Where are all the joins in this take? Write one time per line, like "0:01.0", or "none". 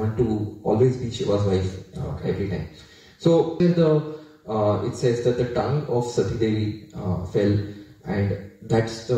0:03.6